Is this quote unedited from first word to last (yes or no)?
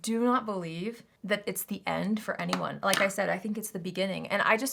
yes